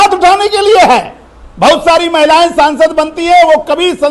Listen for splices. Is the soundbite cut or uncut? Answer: uncut